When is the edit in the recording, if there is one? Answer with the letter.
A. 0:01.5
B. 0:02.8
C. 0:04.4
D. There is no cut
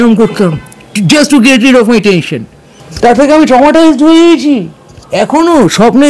B